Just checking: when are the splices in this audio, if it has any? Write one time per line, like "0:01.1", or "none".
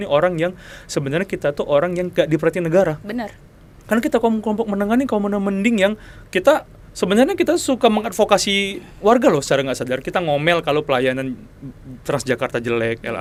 none